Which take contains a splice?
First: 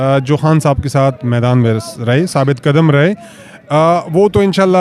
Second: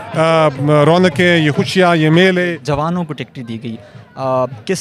second; 1 cut; at 2.6 s

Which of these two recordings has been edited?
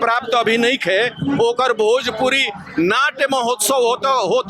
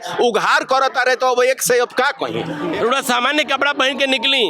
second; 1 cut; at 2.6 s

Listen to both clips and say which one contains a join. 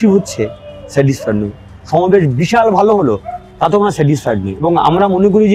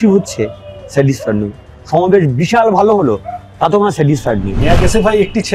second; 1 cut; at 4.6 s

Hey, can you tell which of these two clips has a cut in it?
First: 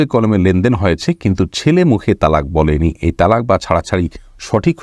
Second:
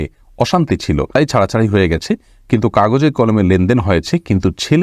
second; 1 cut; at 1.2 s

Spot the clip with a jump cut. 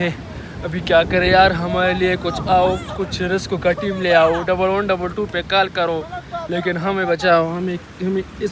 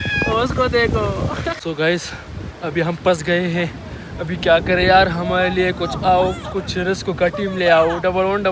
second; 1 cut; at 1.6 s

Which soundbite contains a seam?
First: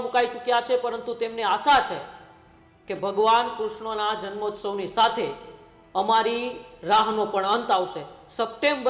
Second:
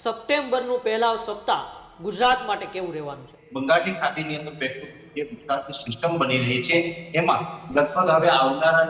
second; 1 cut; at 3.4 s

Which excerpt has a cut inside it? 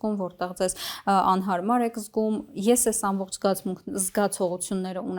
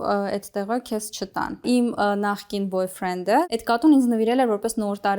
second; 2 cuts; at 1.6 s, 3.4 s

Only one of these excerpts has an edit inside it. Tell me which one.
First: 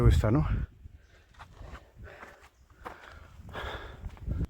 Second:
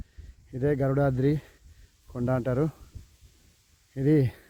first; 1 cut; at 2.0 s

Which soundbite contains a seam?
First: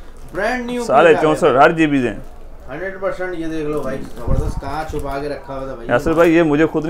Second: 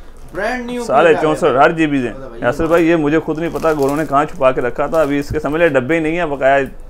second; 1 cut; at 2.2 s

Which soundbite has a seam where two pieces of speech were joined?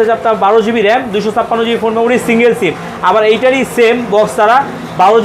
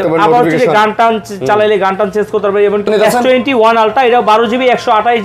second; 1 cut; at 2.9 s

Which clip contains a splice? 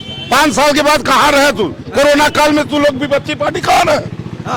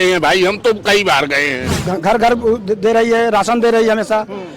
second; 1 cut; at 1.7 s

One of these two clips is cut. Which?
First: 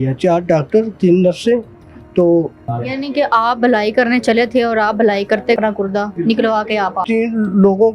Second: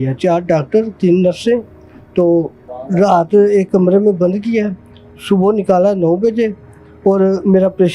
first; 3 cuts; at 2.7 s, 5.6 s, 7.0 s

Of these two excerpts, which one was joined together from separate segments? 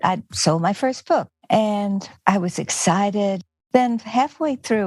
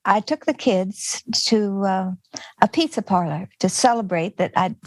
first; 1 cut; at 1.3 s

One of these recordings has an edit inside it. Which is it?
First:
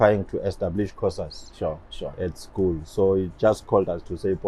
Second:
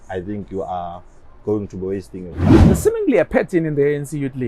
second; 1 cut; at 2.5 s

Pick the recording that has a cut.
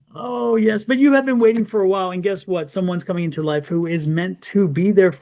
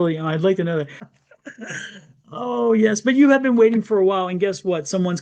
second; 1 cut; at 1.0 s

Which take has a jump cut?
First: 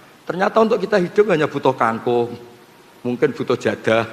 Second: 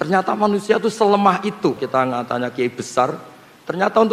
second; 1 cut; at 1.8 s

